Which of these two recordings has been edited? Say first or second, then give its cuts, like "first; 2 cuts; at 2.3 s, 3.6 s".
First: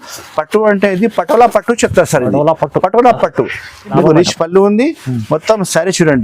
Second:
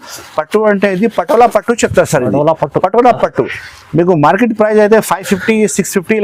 first; 1 cut; at 4.0 s